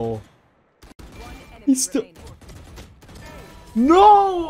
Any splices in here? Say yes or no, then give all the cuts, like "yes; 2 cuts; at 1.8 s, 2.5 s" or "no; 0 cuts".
no; 0 cuts